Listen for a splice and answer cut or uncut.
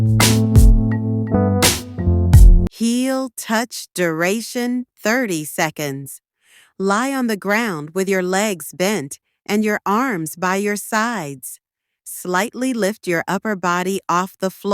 cut